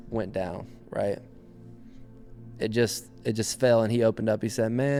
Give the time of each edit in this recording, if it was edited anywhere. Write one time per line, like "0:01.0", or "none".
none